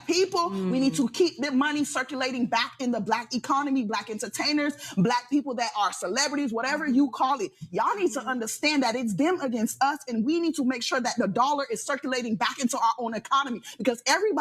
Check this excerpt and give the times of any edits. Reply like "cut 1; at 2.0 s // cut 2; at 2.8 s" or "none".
none